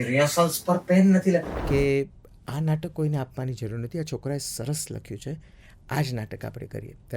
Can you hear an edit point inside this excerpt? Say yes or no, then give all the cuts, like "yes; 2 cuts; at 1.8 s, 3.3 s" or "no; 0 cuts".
yes; 1 cut; at 1.5 s